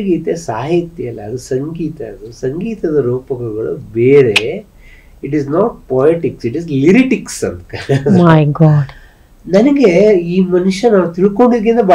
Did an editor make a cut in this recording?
no; 0 cuts

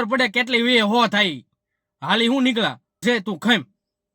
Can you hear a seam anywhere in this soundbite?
yes; 1 cut; at 3.0 s

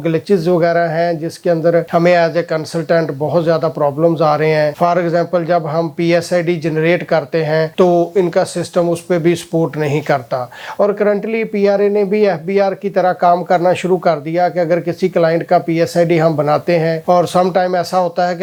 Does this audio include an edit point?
no; 0 cuts

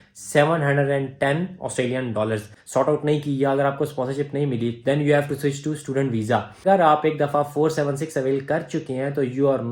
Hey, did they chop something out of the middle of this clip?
yes; 2 cuts; at 2.5 s, 6.5 s

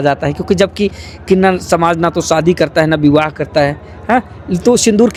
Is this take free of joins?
yes; 0 cuts

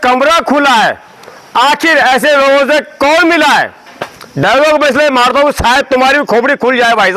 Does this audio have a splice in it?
no; 0 cuts

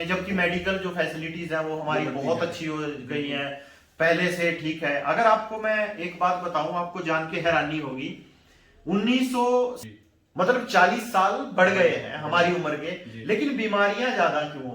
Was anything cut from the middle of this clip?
yes; 1 cut; at 9.8 s

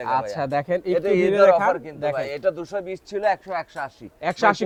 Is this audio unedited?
yes; 0 cuts

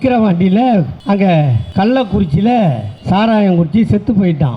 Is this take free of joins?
no; 3 cuts; at 0.9 s, 1.6 s, 2.9 s

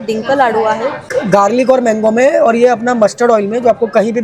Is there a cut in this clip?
yes; 1 cut; at 1.1 s

